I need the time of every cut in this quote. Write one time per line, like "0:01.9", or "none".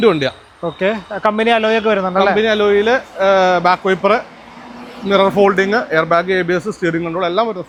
none